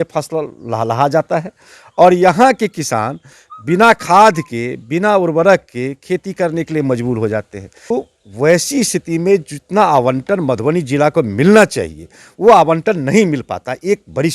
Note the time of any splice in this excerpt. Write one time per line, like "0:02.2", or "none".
0:07.9